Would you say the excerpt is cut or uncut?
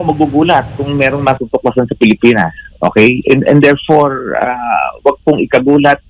uncut